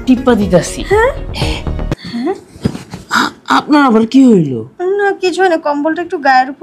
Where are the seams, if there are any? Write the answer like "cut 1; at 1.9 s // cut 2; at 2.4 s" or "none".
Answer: cut 1; at 1.9 s

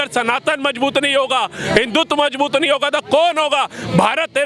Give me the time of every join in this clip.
none

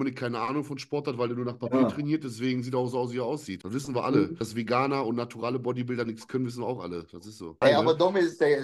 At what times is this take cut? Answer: cut 1; at 3.5 s // cut 2; at 4.4 s // cut 3; at 7.6 s

